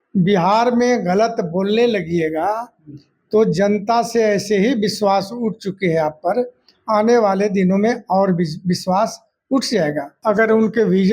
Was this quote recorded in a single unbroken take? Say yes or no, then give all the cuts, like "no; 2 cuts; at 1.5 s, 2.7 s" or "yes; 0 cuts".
no; 1 cut; at 10.1 s